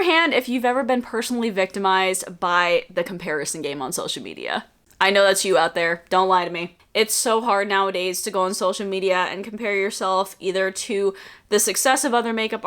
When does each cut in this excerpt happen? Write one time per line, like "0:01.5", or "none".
none

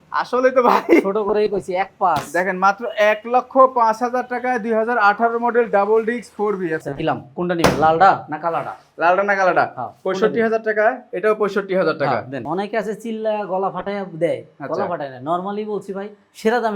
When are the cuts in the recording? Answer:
0:06.8
0:12.4

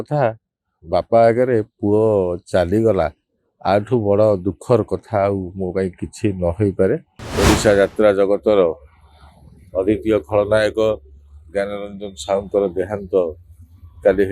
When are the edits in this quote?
0:07.2

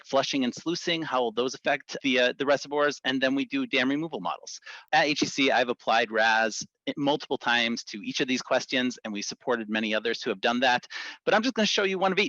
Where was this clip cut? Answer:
0:01.9
0:04.8

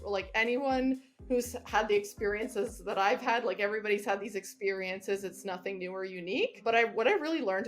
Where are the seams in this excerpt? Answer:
0:06.6

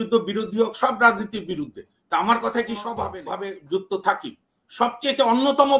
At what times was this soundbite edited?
0:03.2

